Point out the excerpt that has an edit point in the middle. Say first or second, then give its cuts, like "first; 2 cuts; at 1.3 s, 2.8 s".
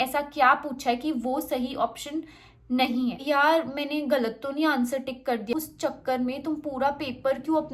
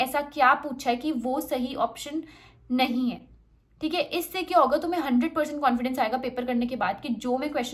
first; 2 cuts; at 3.2 s, 5.5 s